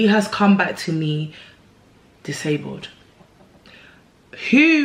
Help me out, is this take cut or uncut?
uncut